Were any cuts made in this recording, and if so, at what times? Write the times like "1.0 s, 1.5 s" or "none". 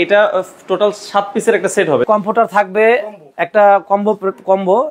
2.0 s